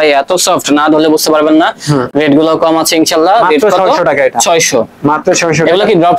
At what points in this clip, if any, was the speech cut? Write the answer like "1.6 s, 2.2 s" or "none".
none